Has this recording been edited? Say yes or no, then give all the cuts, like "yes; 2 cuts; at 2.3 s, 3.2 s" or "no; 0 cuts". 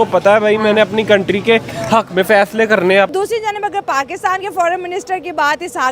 yes; 1 cut; at 3.1 s